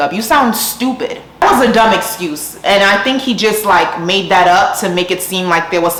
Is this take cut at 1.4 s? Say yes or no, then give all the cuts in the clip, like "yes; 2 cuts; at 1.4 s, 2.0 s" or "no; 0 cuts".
no; 0 cuts